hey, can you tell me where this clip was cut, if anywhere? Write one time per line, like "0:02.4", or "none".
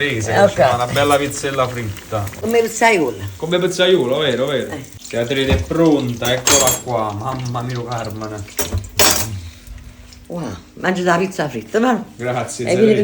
0:02.4